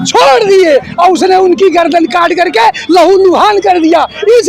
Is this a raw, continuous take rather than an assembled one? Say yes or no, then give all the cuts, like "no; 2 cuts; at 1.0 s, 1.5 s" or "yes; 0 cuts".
yes; 0 cuts